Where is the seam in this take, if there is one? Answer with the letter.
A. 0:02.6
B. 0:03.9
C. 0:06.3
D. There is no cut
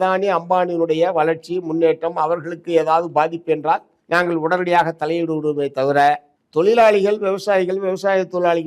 B